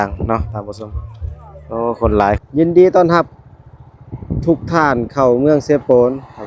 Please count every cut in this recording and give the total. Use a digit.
1